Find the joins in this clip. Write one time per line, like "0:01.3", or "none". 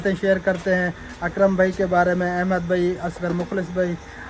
none